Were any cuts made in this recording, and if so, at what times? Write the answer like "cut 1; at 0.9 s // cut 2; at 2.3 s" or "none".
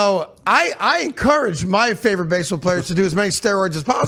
none